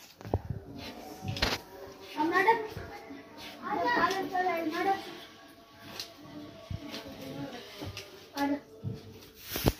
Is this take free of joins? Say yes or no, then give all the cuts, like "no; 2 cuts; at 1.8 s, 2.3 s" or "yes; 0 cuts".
yes; 0 cuts